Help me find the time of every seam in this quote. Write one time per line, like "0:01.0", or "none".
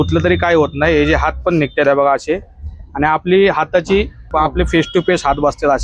0:04.3